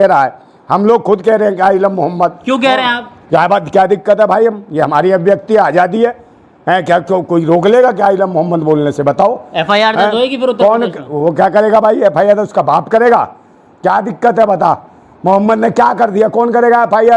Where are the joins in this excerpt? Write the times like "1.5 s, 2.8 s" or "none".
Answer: none